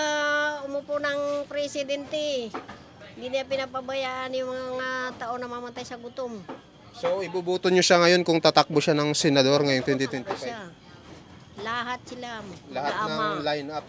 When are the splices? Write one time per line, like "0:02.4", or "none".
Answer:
none